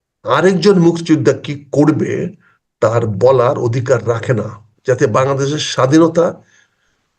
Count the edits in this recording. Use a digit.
1